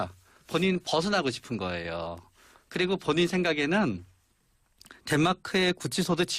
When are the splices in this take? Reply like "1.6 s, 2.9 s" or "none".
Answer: 2.5 s